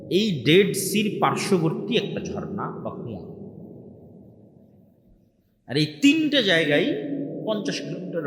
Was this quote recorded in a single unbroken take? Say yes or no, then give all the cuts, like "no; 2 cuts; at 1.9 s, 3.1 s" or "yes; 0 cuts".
yes; 0 cuts